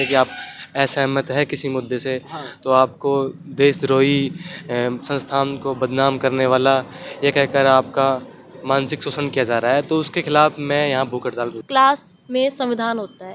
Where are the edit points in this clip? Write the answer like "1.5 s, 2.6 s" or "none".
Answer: 11.6 s

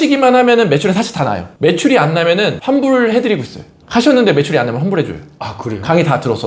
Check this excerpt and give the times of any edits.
none

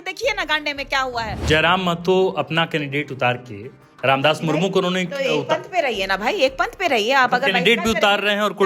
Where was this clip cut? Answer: 1.4 s

